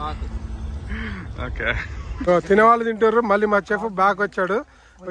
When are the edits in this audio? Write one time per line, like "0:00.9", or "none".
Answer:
0:02.2